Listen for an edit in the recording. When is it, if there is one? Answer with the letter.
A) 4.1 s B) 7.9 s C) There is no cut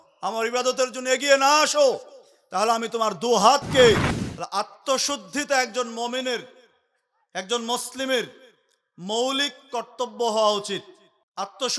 A